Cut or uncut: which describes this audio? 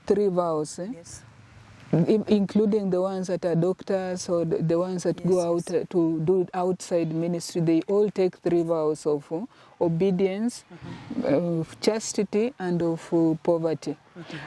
uncut